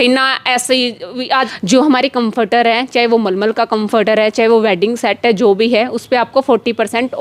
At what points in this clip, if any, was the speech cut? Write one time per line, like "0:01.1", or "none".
0:01.5